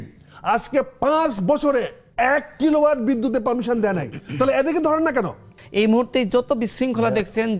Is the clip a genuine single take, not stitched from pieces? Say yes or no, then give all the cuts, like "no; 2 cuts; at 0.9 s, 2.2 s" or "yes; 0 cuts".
no; 1 cut; at 5.6 s